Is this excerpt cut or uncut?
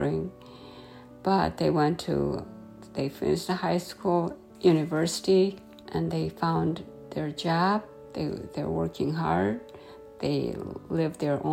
uncut